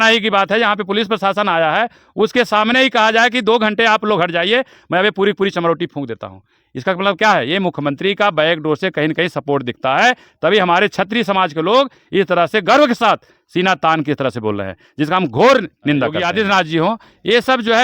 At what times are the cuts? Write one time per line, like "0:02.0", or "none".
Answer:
0:16.2